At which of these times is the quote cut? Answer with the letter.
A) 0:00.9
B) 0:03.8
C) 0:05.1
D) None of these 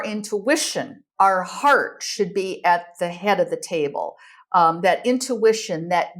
A